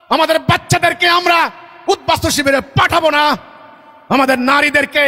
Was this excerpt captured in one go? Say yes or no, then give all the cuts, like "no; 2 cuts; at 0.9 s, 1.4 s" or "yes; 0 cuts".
yes; 0 cuts